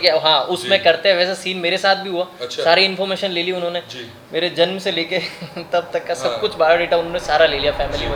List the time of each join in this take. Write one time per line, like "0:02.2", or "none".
none